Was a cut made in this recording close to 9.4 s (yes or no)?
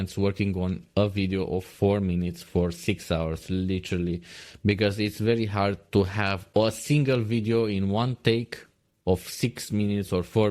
no